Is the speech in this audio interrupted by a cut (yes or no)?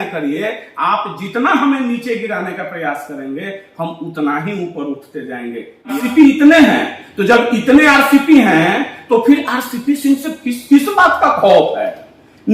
yes